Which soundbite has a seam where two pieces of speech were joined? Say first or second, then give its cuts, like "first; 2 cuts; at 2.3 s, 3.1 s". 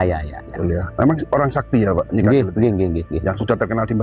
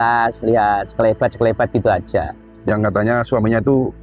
second; 1 cut; at 2.5 s